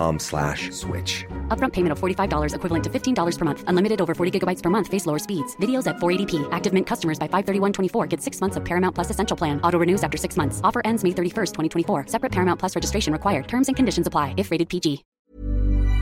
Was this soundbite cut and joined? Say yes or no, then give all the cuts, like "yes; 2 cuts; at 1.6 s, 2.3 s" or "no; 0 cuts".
yes; 1 cut; at 15.1 s